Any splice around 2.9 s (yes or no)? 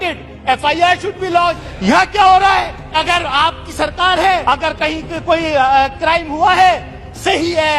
yes